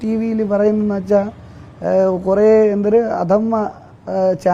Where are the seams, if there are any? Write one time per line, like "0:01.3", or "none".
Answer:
none